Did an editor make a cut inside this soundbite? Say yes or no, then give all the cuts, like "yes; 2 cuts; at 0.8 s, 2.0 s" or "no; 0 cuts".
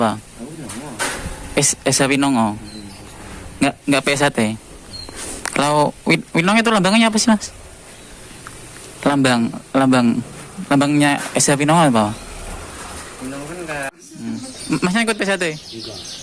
yes; 1 cut; at 14.0 s